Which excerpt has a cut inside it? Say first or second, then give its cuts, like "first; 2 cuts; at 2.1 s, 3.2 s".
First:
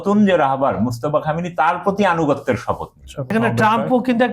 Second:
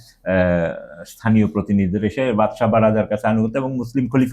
first; 1 cut; at 3.3 s